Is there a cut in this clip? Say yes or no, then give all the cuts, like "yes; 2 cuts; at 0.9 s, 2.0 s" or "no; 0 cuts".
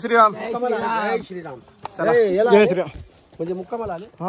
no; 0 cuts